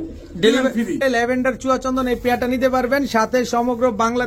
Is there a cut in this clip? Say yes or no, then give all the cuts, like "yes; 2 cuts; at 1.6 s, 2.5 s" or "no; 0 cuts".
yes; 1 cut; at 1.0 s